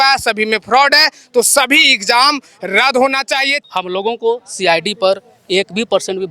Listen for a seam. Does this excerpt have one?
yes; 1 cut; at 3.5 s

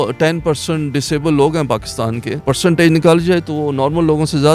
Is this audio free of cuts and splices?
no; 1 cut; at 2.5 s

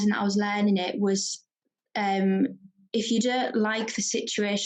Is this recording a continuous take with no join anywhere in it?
yes; 0 cuts

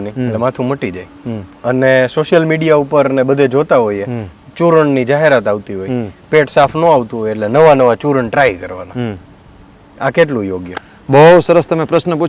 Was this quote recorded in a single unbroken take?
yes; 0 cuts

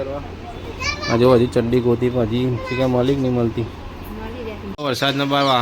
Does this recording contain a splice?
yes; 1 cut; at 4.7 s

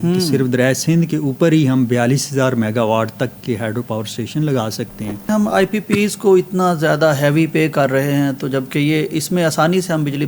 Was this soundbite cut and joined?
yes; 1 cut; at 5.3 s

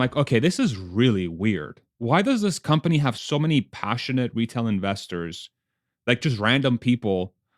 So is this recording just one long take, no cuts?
no; 2 cuts; at 3.2 s, 6.2 s

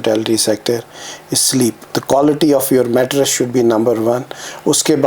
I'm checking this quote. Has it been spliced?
yes; 1 cut; at 1.8 s

